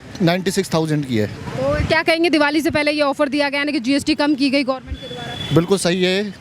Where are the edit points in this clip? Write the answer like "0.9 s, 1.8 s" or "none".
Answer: none